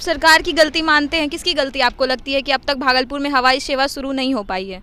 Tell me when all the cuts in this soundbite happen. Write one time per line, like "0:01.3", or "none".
none